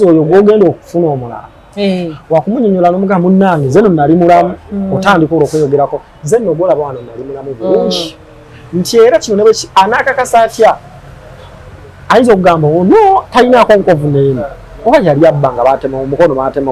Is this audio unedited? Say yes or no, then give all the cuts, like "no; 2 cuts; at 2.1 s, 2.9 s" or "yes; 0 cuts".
yes; 0 cuts